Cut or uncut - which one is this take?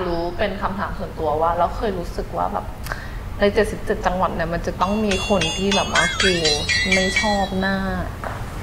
uncut